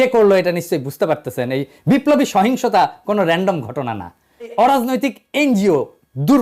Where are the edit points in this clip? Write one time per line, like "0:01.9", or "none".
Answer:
0:04.5

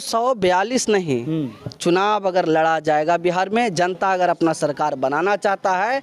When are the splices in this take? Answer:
none

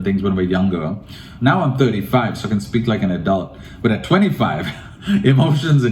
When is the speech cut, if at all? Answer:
none

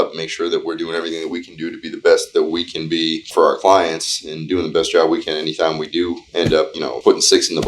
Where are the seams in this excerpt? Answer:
0:03.2
0:06.8

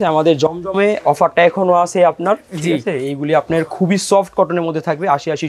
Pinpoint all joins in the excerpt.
none

